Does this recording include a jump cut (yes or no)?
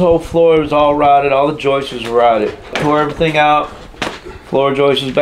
yes